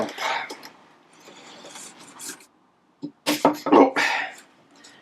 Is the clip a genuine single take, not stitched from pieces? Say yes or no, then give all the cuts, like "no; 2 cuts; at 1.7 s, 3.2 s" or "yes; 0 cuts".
no; 1 cut; at 2.4 s